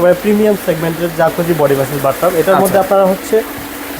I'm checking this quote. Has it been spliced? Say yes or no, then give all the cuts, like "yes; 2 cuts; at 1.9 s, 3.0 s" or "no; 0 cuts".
no; 0 cuts